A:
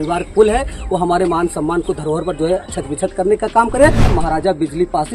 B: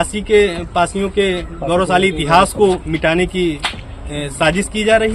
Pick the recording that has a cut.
A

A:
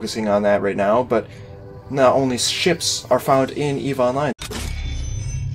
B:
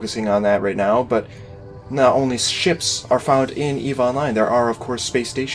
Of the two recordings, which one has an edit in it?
B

